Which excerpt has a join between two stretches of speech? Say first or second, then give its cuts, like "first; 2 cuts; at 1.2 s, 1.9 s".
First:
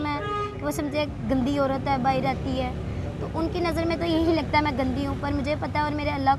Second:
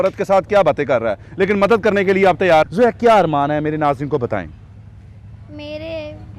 second; 1 cut; at 2.7 s